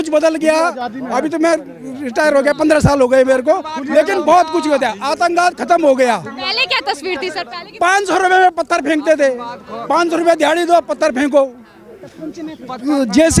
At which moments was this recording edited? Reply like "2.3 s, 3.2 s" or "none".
none